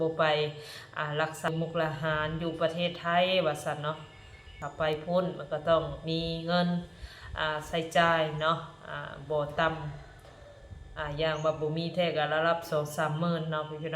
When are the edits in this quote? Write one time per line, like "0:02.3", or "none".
0:01.5
0:04.6